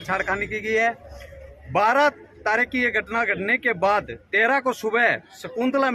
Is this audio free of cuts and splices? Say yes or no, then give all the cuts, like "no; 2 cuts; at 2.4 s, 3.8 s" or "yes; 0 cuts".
yes; 0 cuts